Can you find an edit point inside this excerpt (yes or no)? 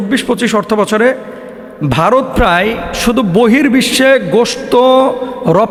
no